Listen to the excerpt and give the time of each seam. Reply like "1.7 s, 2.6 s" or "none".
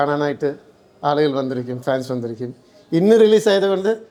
none